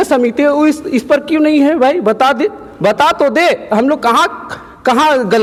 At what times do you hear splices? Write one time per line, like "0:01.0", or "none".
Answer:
none